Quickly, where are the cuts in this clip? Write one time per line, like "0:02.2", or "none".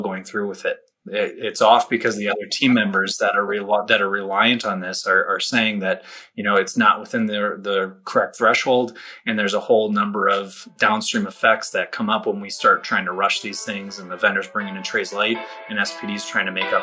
0:10.7